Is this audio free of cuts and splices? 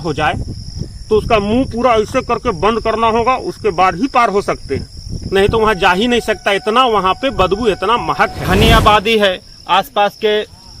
no; 1 cut; at 8.4 s

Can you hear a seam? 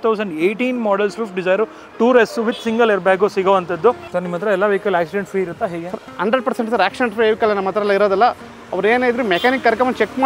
yes; 1 cut; at 4.0 s

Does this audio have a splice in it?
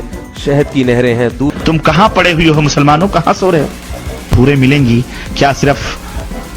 yes; 2 cuts; at 1.6 s, 4.3 s

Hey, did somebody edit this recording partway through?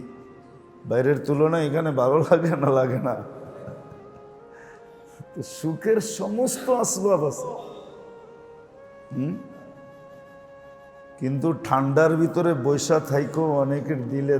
yes; 4 cuts; at 3.9 s, 5.3 s, 9.8 s, 11.2 s

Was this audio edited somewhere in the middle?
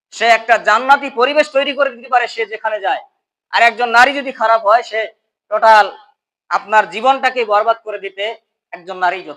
no; 0 cuts

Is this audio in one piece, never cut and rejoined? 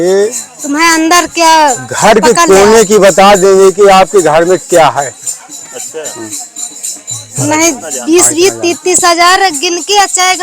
yes; 0 cuts

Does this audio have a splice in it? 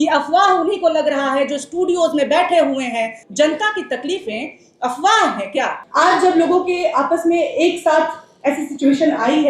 yes; 2 cuts; at 3.2 s, 5.8 s

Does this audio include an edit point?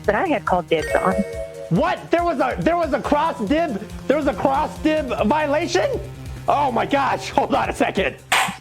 no; 0 cuts

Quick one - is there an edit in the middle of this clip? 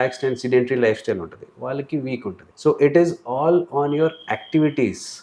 yes; 1 cut; at 2.5 s

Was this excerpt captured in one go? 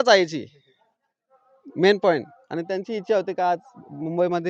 yes; 0 cuts

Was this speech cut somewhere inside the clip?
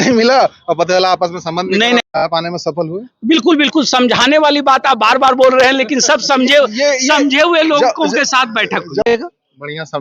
yes; 2 cuts; at 2.0 s, 9.1 s

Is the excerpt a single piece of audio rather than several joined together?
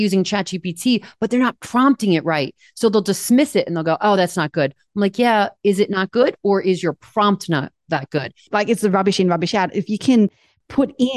no; 1 cut; at 8.3 s

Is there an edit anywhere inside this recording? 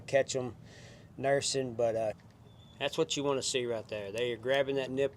yes; 1 cut; at 2.2 s

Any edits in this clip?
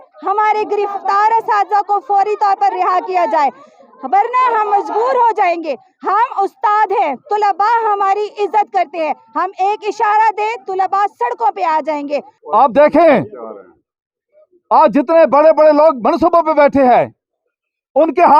yes; 1 cut; at 12.3 s

